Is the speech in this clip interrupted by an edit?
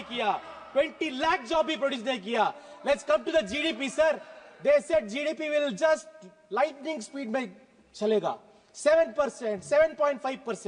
no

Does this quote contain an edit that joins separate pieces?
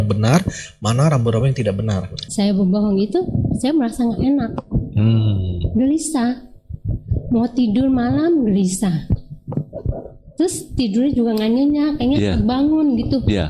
yes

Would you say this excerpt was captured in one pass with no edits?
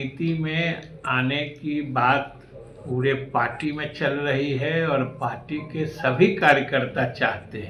yes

